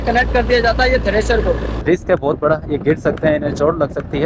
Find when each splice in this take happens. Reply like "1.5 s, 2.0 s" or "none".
1.8 s